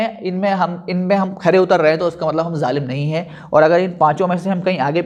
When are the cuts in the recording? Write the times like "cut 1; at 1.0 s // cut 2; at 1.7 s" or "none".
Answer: none